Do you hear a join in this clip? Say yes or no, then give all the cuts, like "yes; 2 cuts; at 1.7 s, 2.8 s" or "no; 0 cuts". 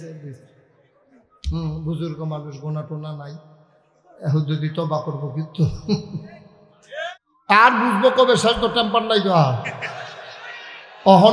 yes; 1 cut; at 7.2 s